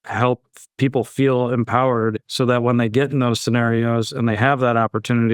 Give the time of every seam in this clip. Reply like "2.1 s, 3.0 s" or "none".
2.3 s